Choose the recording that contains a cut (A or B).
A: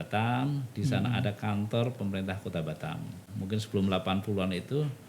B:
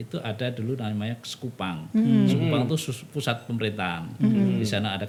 A